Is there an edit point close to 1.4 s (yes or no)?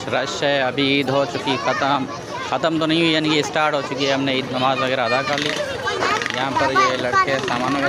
no